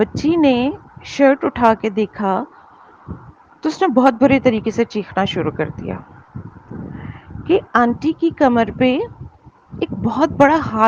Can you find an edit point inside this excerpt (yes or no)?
no